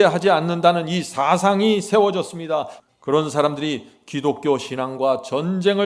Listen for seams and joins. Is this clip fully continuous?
no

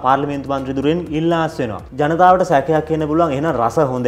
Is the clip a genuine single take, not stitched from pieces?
no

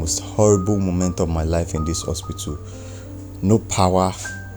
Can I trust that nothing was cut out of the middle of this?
yes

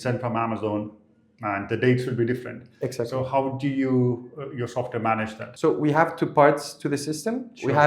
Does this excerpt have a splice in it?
yes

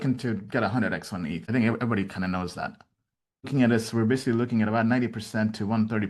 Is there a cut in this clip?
yes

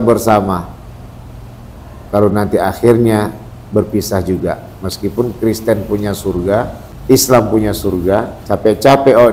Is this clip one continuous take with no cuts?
no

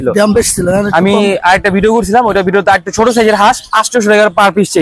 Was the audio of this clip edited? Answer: no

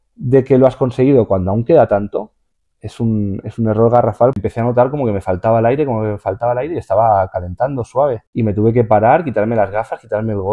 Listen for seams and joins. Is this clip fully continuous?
no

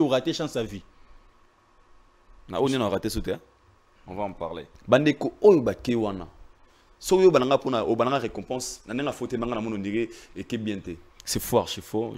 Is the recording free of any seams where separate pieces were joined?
no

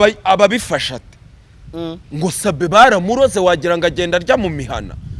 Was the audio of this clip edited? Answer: no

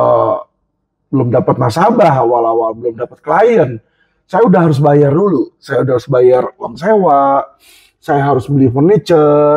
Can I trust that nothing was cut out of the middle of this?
yes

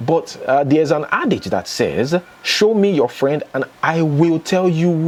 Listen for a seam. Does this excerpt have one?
no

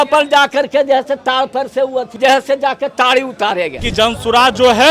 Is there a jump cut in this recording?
yes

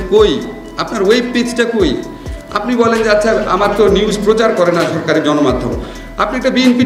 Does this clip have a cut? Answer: no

